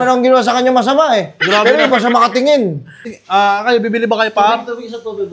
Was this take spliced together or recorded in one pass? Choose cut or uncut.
cut